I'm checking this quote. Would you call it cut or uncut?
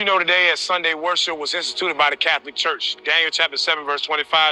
uncut